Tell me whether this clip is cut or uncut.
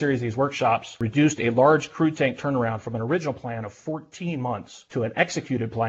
cut